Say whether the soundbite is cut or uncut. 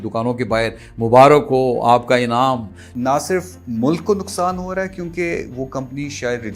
cut